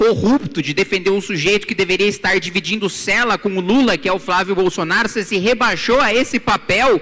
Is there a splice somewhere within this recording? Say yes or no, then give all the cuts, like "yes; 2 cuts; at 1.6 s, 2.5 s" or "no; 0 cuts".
no; 0 cuts